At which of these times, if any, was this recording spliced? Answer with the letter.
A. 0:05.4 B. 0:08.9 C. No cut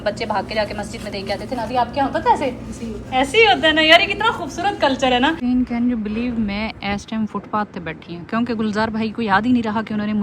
A